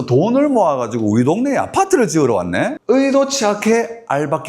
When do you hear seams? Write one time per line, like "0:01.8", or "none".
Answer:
0:02.8

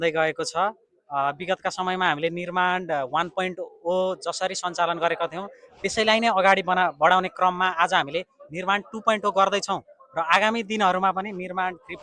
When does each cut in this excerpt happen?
none

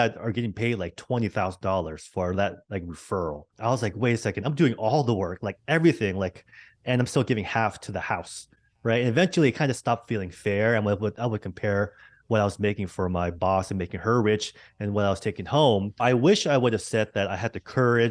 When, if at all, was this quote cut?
0:03.5
0:16.0

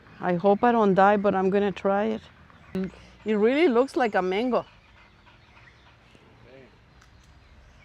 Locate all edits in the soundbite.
0:02.8

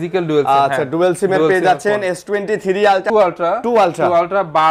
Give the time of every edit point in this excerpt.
0:03.0

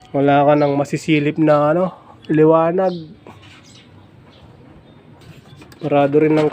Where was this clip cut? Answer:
0:05.2

